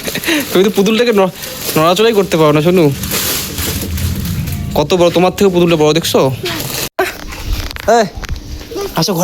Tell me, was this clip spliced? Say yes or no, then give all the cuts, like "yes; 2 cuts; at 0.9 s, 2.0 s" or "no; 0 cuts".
yes; 1 cut; at 6.9 s